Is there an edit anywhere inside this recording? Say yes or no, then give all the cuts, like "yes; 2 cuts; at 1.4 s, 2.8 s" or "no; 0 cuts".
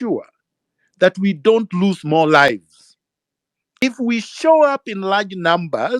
yes; 1 cut; at 3.8 s